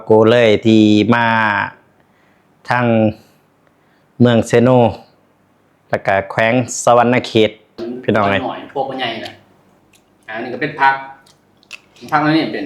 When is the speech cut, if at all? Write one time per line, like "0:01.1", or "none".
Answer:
0:08.4